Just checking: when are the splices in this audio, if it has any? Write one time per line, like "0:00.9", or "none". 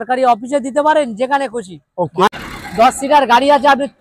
0:02.3